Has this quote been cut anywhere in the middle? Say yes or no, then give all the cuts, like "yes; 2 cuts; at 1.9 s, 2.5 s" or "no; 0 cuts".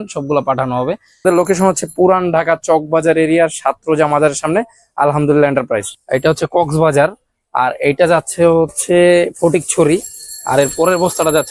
yes; 2 cuts; at 1.2 s, 5.9 s